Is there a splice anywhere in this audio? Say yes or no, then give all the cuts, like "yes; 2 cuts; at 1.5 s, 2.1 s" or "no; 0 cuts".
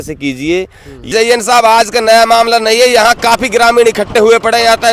yes; 1 cut; at 1.1 s